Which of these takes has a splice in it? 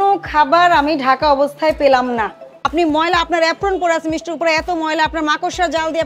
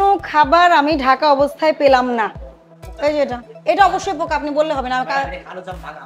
first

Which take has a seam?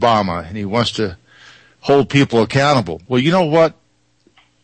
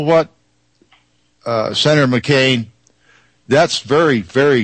first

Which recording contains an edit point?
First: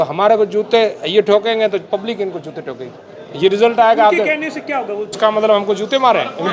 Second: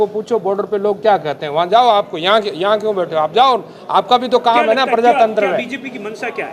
first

